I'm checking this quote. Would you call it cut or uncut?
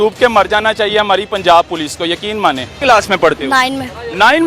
cut